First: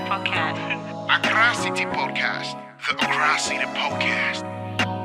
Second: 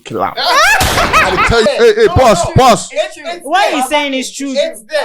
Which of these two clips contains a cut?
second; 1 cut; at 1.6 s

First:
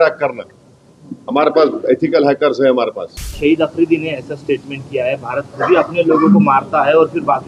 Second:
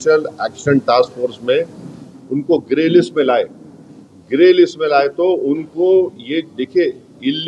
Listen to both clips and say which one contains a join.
first; 1 cut; at 3.2 s

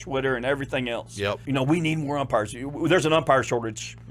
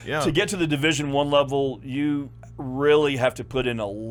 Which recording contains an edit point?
first; 1 cut; at 1.4 s

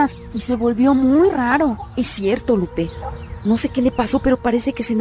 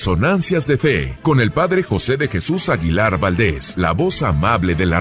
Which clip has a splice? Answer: second; 2 cuts; at 1.1 s, 3.6 s

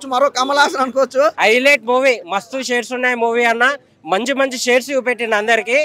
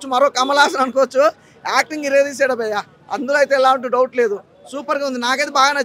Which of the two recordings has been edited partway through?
first; 1 cut; at 1.4 s

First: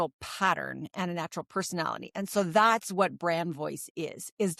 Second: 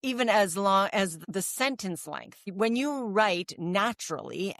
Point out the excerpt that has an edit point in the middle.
second; 2 cuts; at 1.2 s, 2.4 s

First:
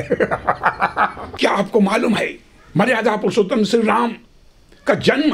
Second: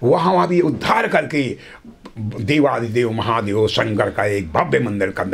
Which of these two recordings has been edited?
first; 1 cut; at 1.2 s

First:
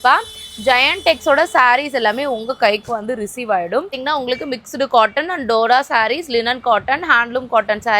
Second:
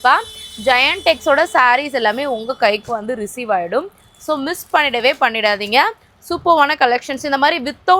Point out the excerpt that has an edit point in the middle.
first; 1 cut; at 3.9 s

